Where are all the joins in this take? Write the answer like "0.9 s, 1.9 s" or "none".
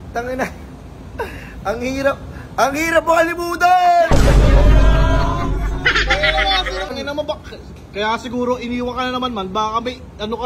6.9 s